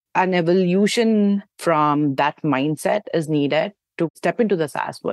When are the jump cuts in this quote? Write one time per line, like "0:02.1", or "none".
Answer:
0:01.5
0:04.1